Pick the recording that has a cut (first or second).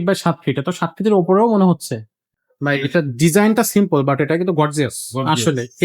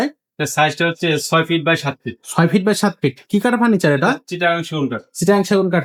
first